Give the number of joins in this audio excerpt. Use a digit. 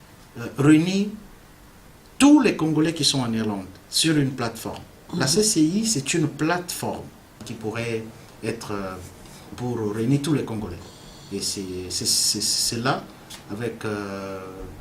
1